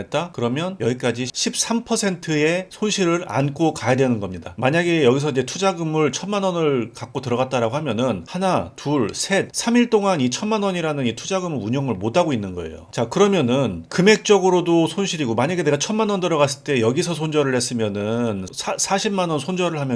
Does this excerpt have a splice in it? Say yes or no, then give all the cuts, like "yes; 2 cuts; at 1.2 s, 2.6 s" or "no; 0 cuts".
yes; 1 cut; at 1.3 s